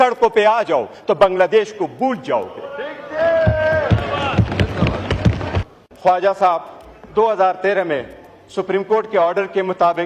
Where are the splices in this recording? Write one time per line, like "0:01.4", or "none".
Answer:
0:05.7